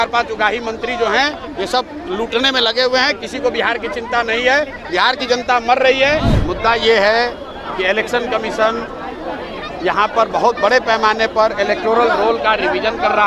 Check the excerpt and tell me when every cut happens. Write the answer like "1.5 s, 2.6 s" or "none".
6.3 s